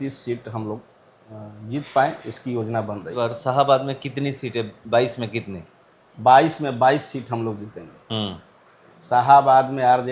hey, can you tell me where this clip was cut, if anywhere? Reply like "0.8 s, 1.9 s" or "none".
3.1 s

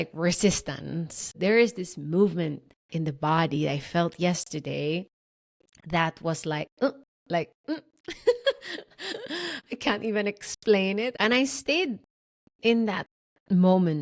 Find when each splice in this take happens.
1.2 s, 11.1 s

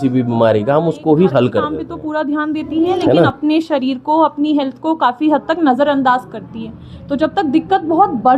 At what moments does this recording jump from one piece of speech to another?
1.9 s

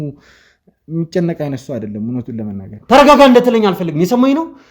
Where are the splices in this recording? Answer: 2.7 s

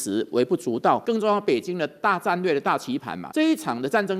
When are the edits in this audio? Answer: 1.0 s, 3.2 s

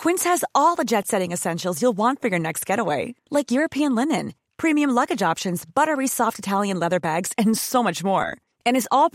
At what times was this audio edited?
none

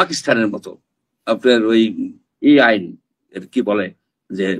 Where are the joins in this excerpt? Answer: none

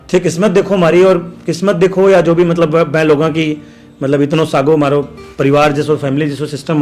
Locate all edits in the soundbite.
none

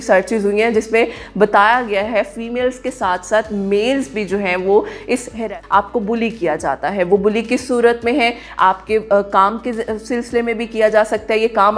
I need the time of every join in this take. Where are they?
5.4 s

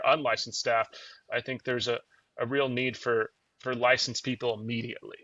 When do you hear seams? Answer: none

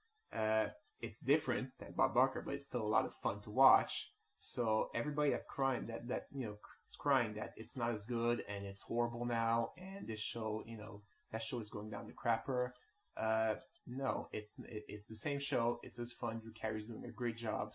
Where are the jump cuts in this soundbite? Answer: 11.6 s

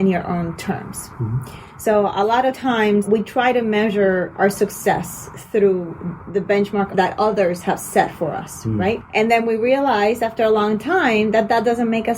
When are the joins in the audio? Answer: 3.1 s, 6.9 s, 9.0 s

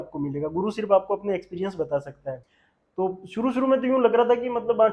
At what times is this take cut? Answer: 2.5 s

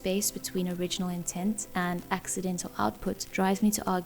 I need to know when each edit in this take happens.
none

